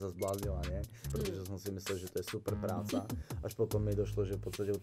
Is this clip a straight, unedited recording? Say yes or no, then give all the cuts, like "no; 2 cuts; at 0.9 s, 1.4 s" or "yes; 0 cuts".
no; 1 cut; at 1.0 s